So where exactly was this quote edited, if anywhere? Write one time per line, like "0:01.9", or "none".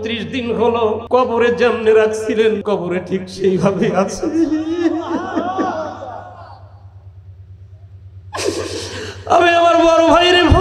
0:01.0
0:02.6